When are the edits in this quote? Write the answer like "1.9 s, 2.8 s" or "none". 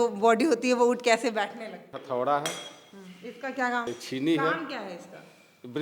1.9 s, 3.9 s